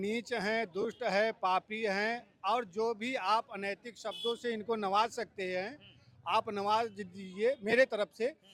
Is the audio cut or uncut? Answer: uncut